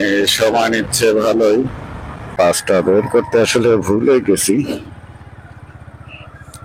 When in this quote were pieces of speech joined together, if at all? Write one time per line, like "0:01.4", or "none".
0:02.3